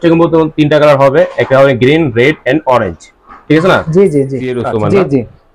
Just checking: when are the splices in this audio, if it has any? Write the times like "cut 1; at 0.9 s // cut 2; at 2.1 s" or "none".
cut 1; at 4.6 s